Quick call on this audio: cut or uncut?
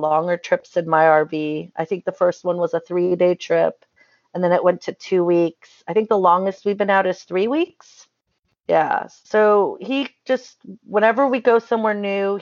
uncut